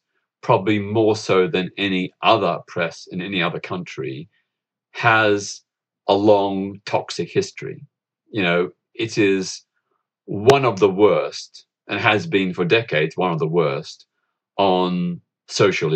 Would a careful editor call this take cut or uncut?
uncut